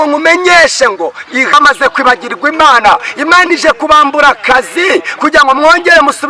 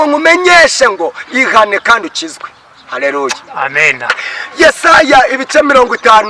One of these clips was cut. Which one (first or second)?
first